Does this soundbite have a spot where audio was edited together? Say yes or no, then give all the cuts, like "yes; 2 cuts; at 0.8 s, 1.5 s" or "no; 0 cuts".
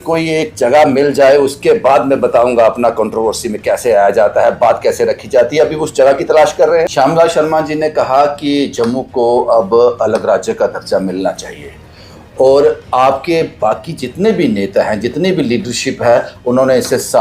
yes; 1 cut; at 6.9 s